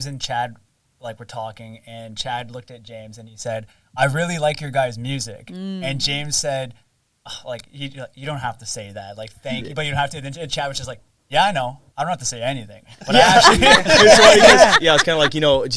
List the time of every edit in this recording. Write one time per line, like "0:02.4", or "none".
0:14.7